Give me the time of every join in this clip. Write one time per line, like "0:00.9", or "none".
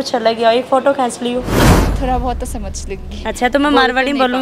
0:01.8